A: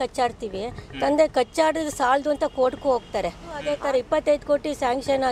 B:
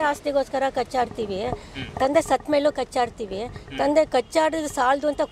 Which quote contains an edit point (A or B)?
A